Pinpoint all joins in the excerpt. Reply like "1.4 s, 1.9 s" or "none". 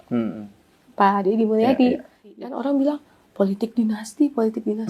2.4 s